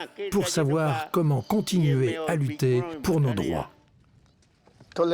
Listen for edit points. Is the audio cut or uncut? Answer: cut